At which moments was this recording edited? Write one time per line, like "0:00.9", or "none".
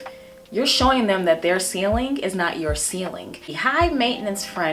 0:03.6